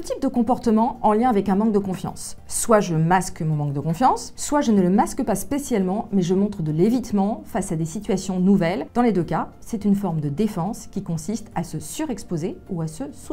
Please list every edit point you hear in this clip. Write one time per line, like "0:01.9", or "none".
0:04.3
0:08.9

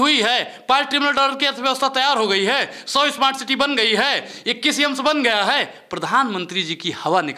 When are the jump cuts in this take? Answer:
none

